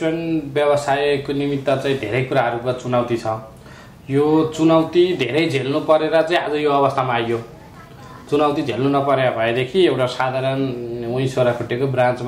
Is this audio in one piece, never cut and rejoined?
yes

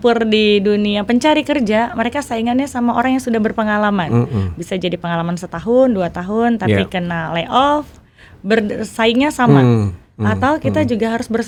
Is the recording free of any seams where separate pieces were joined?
yes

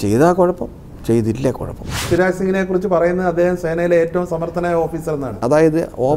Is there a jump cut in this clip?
yes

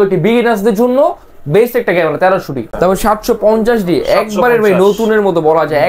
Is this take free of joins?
no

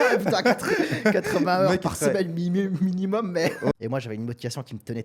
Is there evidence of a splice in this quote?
yes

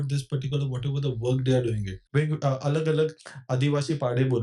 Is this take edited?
yes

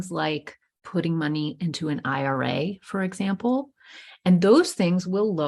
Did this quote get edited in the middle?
no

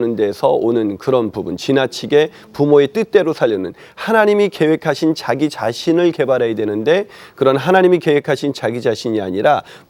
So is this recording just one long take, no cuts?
yes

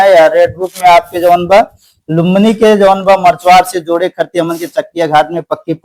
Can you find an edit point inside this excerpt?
no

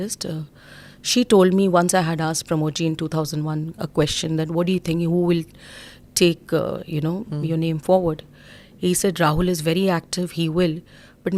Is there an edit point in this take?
no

